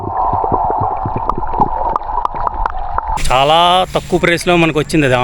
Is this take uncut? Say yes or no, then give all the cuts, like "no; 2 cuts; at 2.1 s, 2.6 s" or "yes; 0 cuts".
no; 1 cut; at 3.2 s